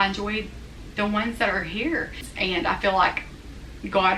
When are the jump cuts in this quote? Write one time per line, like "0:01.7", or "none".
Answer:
0:02.3